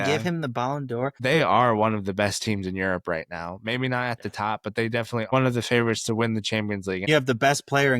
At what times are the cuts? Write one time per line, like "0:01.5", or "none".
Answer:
0:01.2
0:05.3
0:07.1